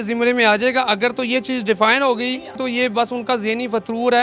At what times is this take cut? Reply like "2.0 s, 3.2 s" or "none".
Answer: 2.6 s